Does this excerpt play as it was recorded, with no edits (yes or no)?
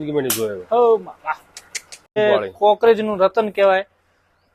no